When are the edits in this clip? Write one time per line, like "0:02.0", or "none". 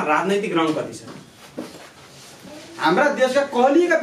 0:02.5